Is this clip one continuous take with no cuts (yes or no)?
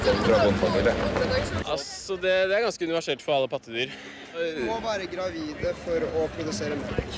no